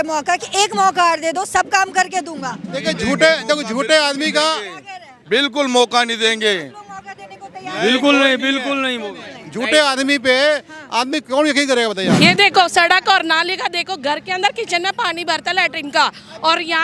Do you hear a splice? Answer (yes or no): yes